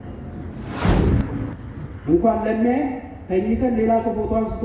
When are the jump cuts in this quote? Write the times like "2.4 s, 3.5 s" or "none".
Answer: none